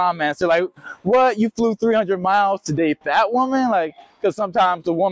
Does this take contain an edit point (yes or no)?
no